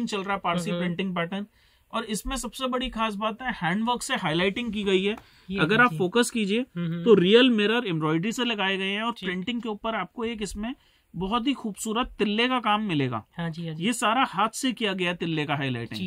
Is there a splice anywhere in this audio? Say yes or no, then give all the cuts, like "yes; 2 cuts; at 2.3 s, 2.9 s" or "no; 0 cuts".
no; 0 cuts